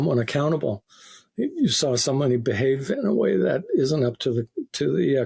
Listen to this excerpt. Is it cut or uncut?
uncut